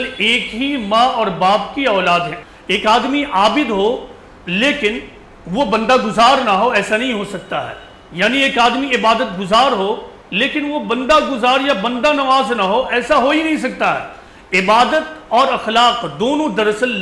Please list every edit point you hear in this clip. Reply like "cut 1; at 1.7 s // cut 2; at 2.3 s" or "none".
cut 1; at 2.4 s